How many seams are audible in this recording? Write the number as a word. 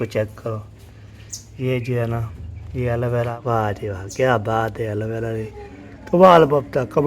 one